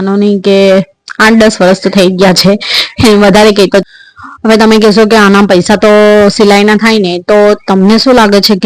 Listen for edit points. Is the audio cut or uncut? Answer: cut